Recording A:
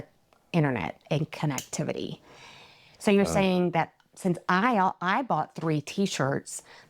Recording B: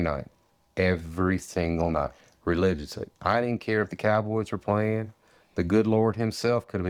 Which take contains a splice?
A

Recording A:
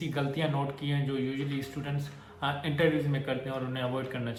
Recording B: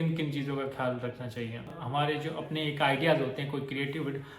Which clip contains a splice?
B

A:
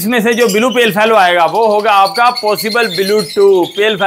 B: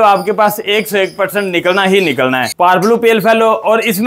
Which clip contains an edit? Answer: B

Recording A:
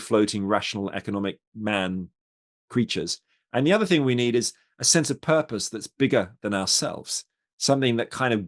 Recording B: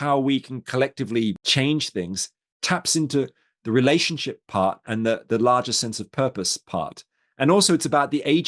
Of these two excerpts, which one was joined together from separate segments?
B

